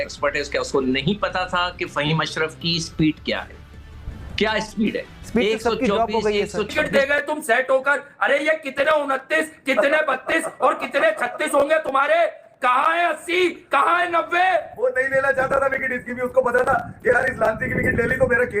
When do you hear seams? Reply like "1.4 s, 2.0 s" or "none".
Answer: 6.7 s